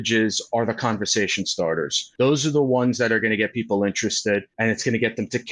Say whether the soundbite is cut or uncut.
cut